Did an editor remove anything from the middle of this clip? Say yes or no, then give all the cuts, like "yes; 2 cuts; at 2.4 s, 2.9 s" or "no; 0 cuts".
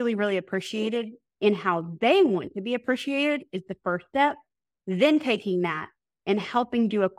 no; 0 cuts